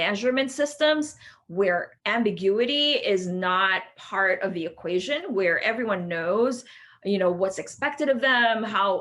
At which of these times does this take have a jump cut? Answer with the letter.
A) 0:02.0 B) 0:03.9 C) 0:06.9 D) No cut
A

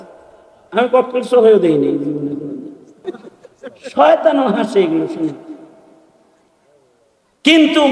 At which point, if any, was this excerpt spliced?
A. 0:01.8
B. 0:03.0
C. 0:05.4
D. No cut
B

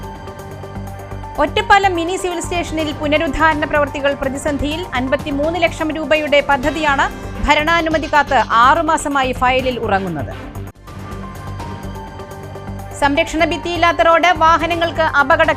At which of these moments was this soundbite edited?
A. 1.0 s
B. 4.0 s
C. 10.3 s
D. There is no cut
A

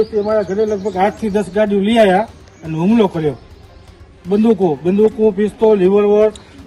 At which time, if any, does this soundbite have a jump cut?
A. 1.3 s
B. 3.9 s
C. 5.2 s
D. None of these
D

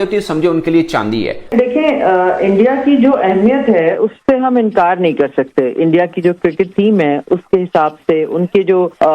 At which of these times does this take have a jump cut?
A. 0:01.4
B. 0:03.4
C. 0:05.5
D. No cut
A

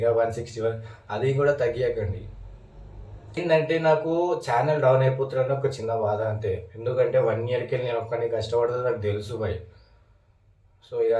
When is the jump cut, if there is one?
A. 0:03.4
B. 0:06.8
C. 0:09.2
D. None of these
A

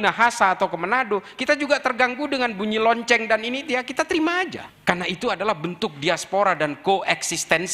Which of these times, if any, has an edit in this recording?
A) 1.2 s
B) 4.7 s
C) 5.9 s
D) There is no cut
B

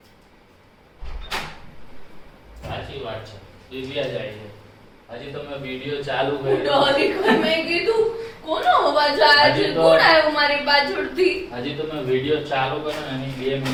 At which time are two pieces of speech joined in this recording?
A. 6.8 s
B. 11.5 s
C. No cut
C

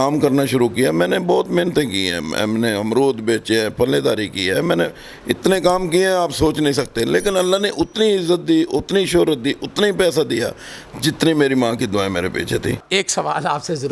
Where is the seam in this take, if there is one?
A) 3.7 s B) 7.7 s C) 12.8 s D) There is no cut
C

